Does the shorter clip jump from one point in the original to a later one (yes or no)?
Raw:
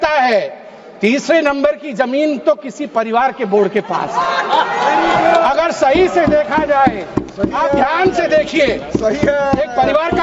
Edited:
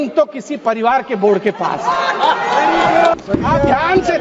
yes